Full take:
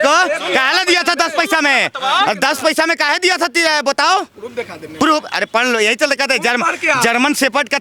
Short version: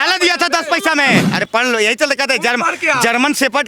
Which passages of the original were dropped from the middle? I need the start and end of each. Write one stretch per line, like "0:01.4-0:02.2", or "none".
0:01.9-0:05.3

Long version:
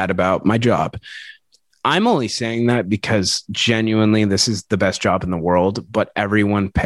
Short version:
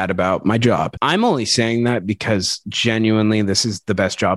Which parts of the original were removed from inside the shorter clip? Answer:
0:00.9-0:01.8

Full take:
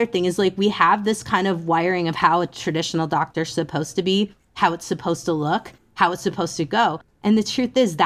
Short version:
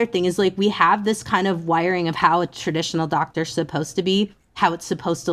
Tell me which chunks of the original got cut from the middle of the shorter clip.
none

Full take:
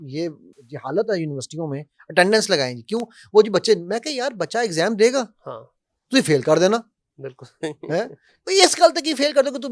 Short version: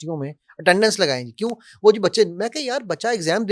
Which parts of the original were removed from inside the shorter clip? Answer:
none

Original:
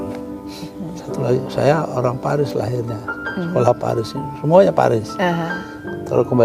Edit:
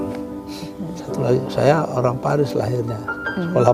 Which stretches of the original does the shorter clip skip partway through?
none

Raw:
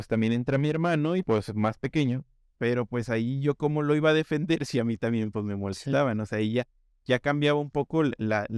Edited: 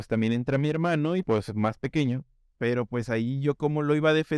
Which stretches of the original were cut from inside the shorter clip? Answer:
none

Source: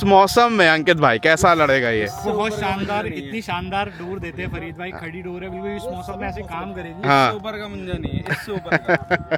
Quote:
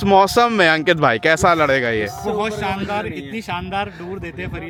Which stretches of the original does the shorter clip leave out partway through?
none

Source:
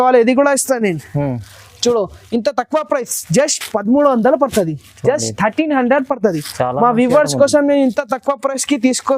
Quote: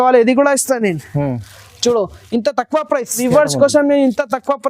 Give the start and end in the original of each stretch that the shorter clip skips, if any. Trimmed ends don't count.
0:03.2-0:07.0

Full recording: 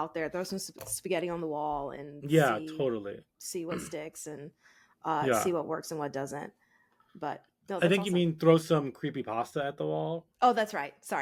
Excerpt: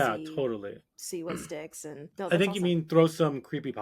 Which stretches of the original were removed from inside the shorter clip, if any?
0:04.5-0:07.6

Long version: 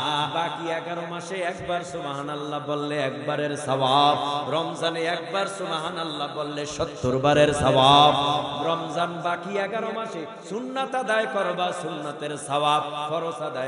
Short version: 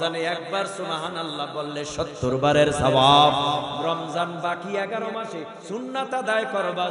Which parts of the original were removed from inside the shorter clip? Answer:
none

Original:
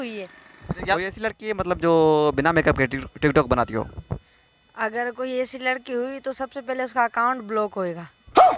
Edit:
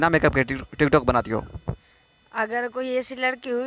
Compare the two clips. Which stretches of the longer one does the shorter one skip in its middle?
none

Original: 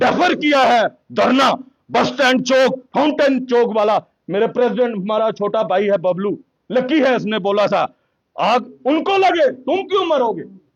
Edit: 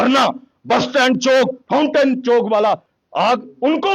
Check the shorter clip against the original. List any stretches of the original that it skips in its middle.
0:04.2-0:08.2

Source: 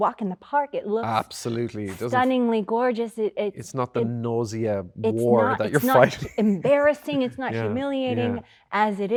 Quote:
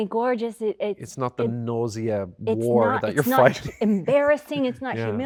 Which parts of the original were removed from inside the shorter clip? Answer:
none

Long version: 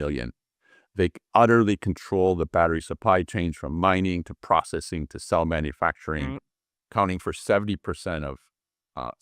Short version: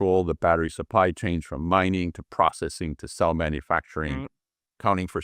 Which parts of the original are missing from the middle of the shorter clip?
none

